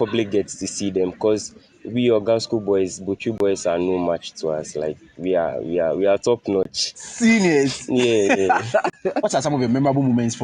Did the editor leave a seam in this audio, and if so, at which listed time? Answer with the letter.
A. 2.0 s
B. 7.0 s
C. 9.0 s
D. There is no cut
C